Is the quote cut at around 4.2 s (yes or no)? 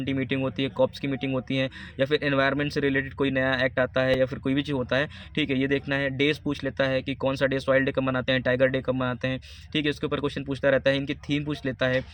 no